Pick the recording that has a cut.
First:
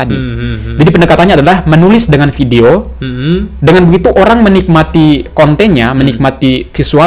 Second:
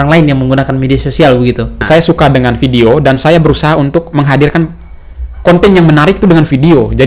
second; 1 cut; at 1.8 s

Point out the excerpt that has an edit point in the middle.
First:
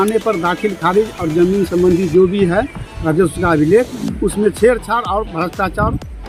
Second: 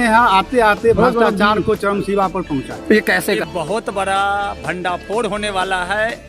second; 1 cut; at 3.4 s

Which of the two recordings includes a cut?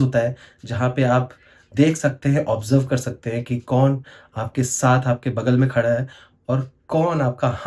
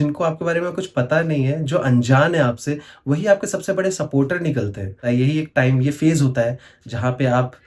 second; 1 cut; at 5.0 s

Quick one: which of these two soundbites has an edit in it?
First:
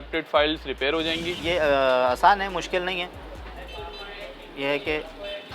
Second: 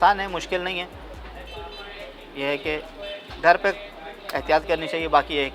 first; 1 cut; at 1.3 s

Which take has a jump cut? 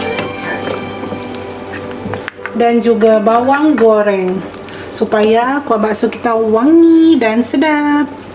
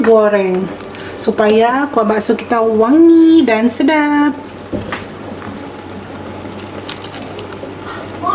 second; 1 cut; at 5.6 s

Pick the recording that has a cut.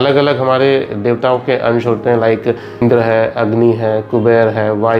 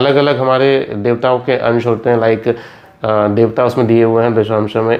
first; 1 cut; at 2.8 s

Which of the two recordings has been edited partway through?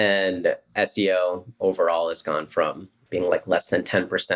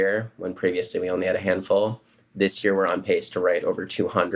first; 1 cut; at 3.0 s

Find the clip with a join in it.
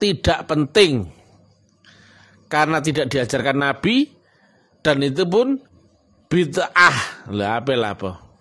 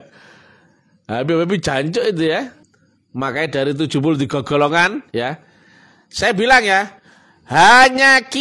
second; 1 cut; at 2.6 s

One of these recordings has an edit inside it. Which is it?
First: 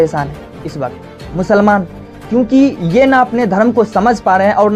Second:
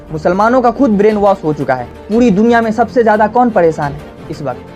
second; 1 cut; at 1.9 s

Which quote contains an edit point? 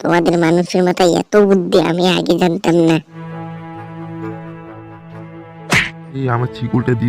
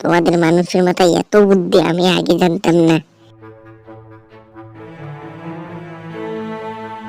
first; 2 cuts; at 3.1 s, 6.2 s

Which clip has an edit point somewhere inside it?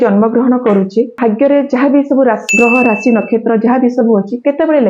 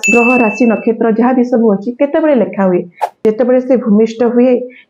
first; 1 cut; at 1.1 s

